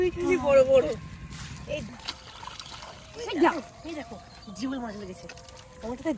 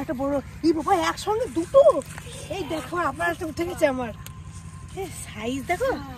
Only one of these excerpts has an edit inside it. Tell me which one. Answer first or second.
first